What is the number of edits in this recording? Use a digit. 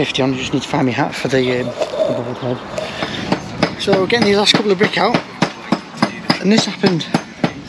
1